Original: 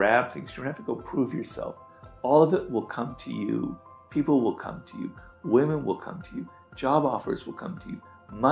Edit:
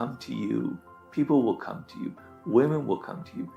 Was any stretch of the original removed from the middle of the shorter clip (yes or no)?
no